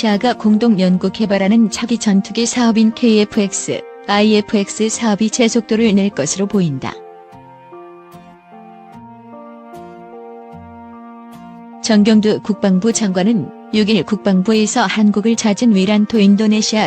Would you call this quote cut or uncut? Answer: cut